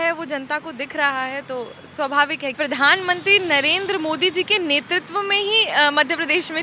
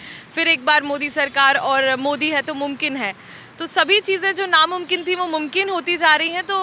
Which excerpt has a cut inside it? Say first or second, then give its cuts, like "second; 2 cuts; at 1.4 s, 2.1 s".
first; 1 cut; at 2.5 s